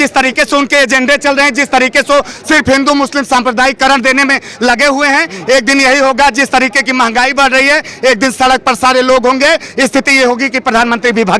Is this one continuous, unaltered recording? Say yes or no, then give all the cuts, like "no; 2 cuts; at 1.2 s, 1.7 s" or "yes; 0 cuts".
yes; 0 cuts